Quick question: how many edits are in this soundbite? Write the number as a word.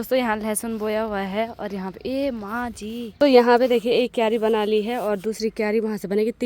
one